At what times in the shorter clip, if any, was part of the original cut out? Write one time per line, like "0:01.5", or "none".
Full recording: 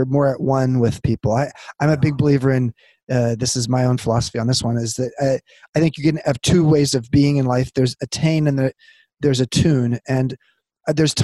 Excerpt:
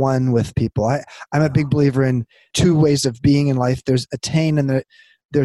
0:02.5